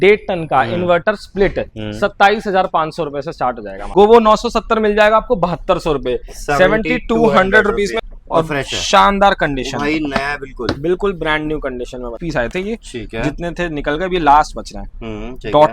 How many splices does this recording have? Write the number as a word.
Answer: three